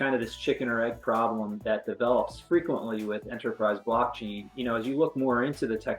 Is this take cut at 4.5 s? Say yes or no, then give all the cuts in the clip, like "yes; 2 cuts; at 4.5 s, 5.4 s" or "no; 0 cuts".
yes; 1 cut; at 4.5 s